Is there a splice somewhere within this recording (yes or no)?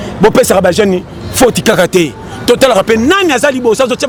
no